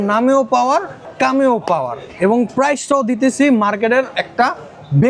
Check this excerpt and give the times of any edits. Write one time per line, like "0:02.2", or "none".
0:01.0